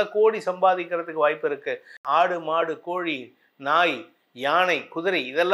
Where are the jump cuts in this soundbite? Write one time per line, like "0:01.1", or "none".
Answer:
0:01.9